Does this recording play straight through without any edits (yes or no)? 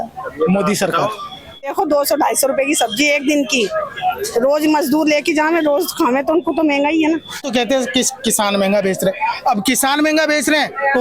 no